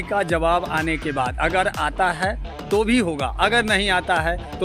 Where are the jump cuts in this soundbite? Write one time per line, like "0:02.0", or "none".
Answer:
none

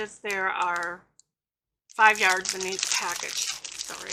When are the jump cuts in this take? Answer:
none

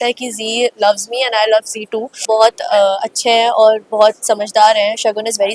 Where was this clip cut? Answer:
0:02.2

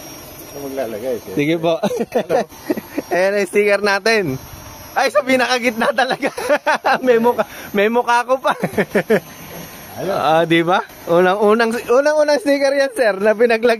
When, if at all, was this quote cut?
none

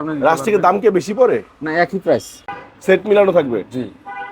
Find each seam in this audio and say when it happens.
0:02.5

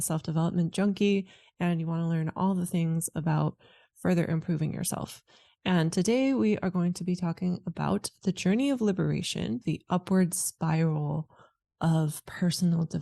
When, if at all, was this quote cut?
0:09.6

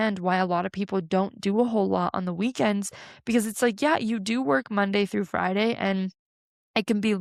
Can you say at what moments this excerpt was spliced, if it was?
none

